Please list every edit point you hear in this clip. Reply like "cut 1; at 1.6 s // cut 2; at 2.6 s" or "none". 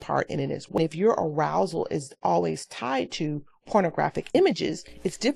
cut 1; at 0.8 s // cut 2; at 4.3 s